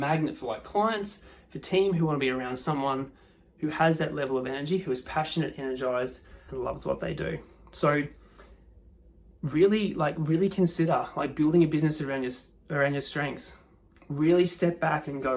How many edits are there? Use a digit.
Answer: 0